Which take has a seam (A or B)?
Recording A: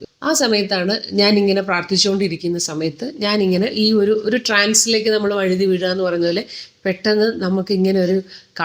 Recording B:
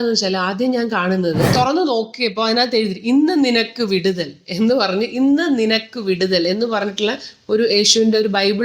B